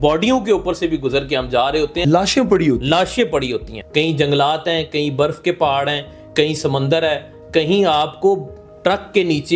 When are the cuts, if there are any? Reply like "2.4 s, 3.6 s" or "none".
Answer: 2.0 s, 3.8 s